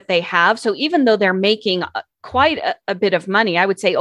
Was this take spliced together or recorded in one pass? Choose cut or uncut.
uncut